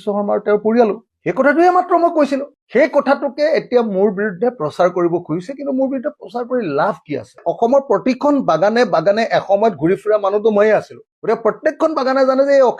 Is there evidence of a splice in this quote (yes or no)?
yes